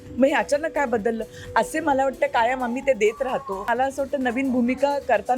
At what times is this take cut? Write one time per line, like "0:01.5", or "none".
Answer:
0:03.6